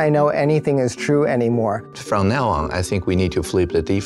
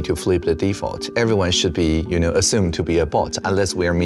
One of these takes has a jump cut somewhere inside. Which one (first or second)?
first